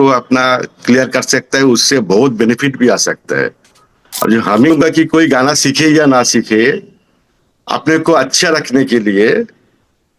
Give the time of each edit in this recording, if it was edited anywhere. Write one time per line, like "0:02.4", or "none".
0:04.7